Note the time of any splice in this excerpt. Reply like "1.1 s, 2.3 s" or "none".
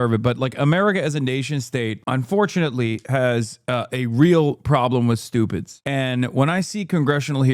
5.8 s